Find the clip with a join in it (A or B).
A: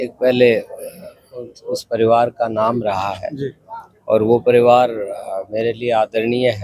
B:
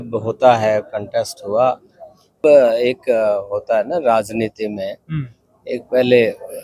B